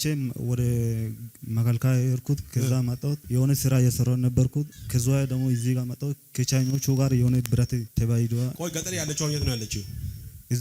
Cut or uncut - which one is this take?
cut